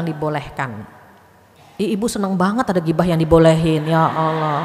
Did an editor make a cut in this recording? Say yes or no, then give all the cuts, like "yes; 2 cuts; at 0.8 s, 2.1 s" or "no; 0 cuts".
no; 0 cuts